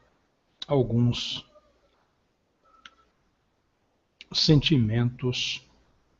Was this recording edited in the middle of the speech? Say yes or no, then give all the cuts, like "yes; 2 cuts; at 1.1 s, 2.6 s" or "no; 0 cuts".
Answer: no; 0 cuts